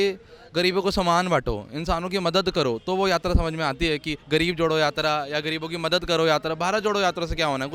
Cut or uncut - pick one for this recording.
uncut